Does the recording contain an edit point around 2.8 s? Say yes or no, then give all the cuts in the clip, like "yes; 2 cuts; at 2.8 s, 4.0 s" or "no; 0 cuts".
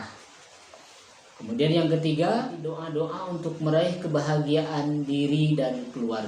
yes; 1 cut; at 2.8 s